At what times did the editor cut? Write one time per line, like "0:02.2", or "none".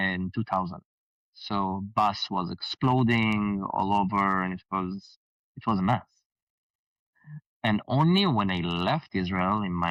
none